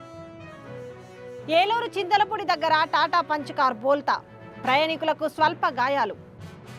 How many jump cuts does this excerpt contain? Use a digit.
1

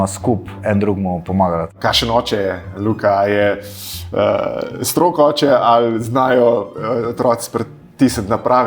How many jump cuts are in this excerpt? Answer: 1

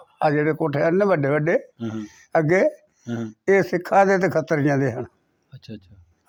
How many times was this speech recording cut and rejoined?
0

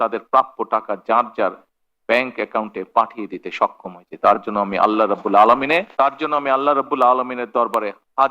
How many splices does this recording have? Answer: 1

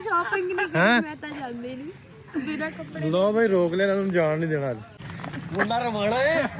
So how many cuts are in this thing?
1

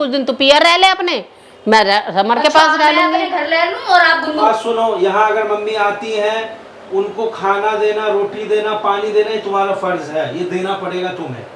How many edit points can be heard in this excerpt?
1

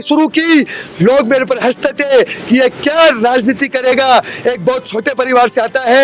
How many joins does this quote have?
0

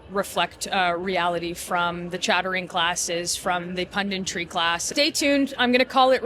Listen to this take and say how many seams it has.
1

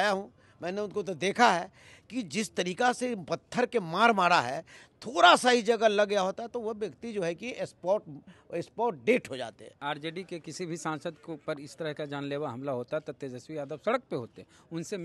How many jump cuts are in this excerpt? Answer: 1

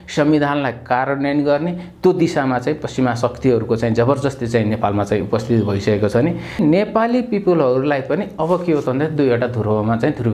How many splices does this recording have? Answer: 1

